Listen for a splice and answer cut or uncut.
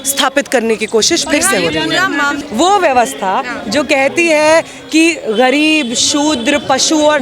cut